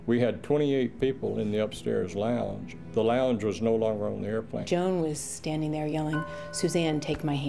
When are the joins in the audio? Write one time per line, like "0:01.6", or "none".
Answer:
0:04.6